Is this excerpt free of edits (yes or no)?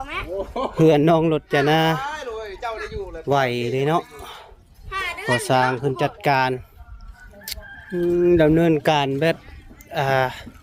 yes